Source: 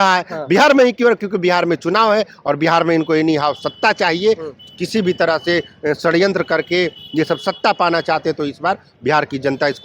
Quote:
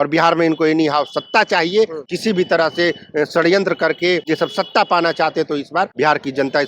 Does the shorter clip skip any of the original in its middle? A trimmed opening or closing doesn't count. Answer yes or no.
yes